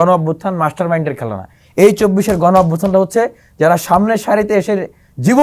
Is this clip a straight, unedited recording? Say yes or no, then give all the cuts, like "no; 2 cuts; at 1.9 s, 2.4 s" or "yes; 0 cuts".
yes; 0 cuts